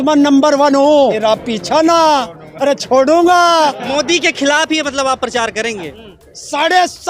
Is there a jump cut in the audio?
yes; 3 cuts; at 1.2 s, 3.8 s, 6.0 s

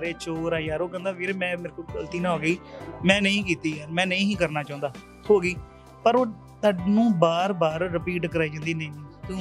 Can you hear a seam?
no; 0 cuts

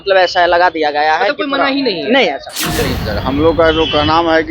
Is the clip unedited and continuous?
no; 1 cut; at 3.0 s

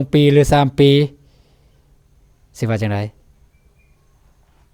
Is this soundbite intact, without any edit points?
yes; 0 cuts

